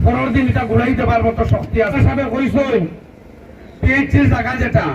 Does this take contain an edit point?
yes; 1 cut; at 1.9 s

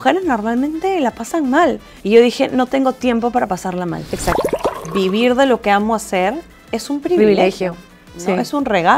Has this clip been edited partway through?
yes; 2 cuts; at 1.9 s, 4.6 s

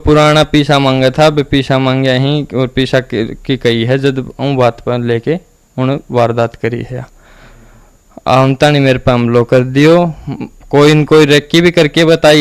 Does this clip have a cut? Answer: no; 0 cuts

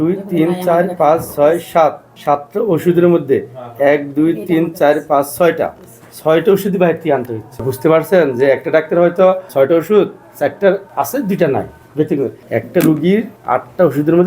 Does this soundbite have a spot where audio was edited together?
yes; 6 cuts; at 7.7 s, 9.4 s, 10.2 s, 10.9 s, 11.9 s, 13.3 s

